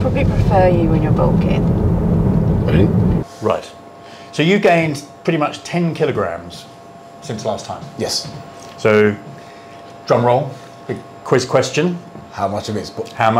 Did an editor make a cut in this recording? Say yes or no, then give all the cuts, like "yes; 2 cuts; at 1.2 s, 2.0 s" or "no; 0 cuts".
yes; 1 cut; at 3.2 s